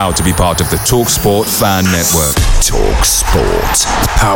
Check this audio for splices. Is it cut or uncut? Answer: uncut